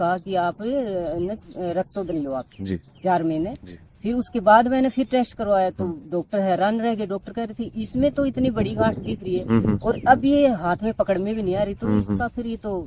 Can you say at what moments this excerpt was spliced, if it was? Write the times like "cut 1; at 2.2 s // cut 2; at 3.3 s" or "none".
none

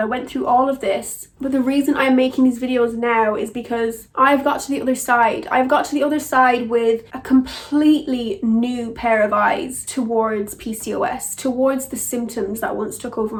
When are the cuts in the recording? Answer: none

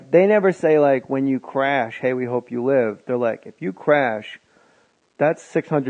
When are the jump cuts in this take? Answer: cut 1; at 1.5 s

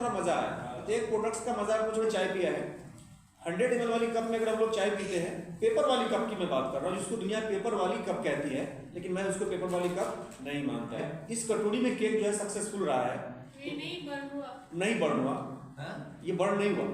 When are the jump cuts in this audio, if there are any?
cut 1; at 2.0 s // cut 2; at 11.1 s

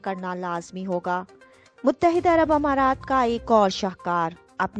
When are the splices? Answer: cut 1; at 1.6 s

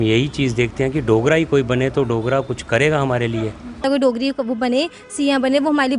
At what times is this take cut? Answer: cut 1; at 3.8 s

